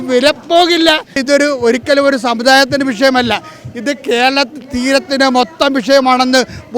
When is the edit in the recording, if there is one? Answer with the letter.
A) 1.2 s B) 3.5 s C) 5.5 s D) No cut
A